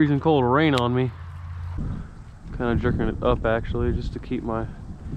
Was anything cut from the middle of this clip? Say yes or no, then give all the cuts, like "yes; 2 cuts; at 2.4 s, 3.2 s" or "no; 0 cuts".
yes; 1 cut; at 1.7 s